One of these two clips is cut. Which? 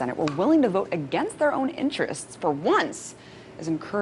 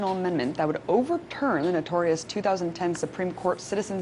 second; 1 cut; at 1.5 s

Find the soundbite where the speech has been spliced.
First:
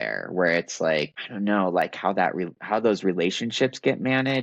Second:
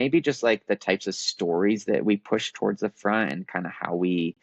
first; 1 cut; at 1.2 s

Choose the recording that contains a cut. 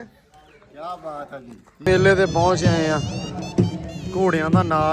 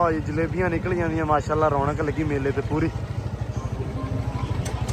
first; 1 cut; at 1.8 s

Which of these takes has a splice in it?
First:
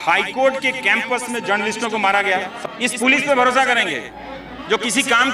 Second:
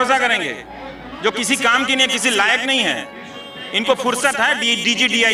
first; 1 cut; at 2.5 s

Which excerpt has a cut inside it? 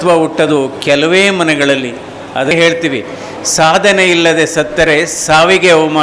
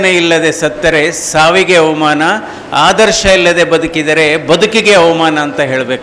first; 1 cut; at 2.5 s

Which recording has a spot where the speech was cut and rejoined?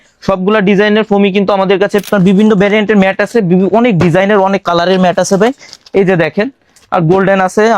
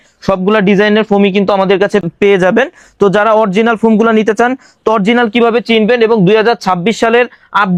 first; 1 cut; at 2.1 s

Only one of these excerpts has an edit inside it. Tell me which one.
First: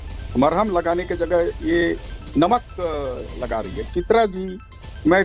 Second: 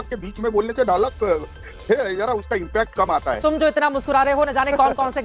second; 1 cut; at 3.4 s

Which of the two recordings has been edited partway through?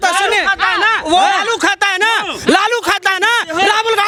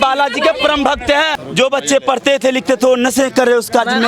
second; 1 cut; at 1.4 s

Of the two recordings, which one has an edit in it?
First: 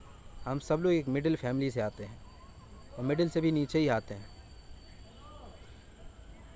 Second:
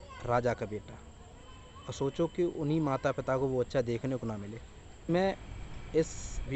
second; 1 cut; at 5.0 s

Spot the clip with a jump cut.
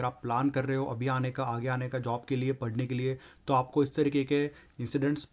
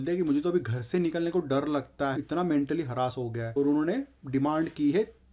second; 2 cuts; at 2.2 s, 3.4 s

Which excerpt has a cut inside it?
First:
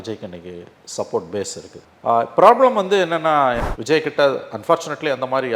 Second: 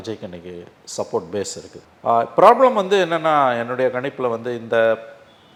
first; 1 cut; at 3.7 s

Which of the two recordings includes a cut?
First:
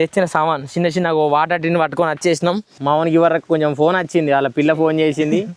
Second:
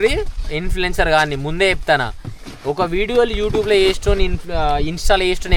first; 1 cut; at 2.7 s

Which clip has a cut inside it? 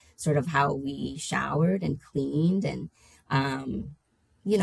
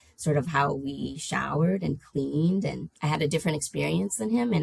second; 1 cut; at 2.9 s

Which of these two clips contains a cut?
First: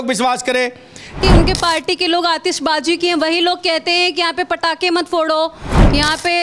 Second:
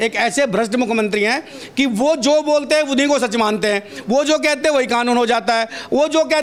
first; 1 cut; at 1.2 s

